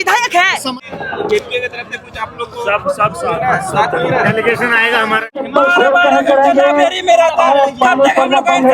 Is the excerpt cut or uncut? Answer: cut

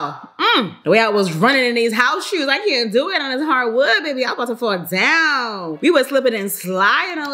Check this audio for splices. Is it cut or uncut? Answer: uncut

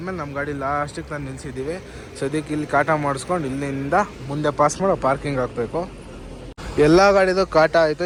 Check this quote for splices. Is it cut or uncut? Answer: uncut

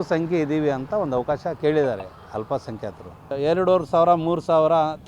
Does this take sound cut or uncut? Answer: cut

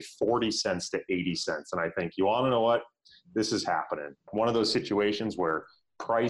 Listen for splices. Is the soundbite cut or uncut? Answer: cut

